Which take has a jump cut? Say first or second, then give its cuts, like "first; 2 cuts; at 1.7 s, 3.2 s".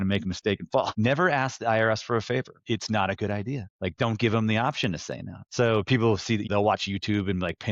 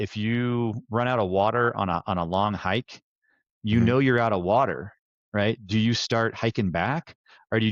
first; 5 cuts; at 0.9 s, 2.6 s, 3.7 s, 5.4 s, 6.5 s